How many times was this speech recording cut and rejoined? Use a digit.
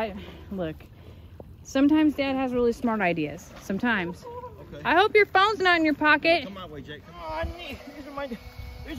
1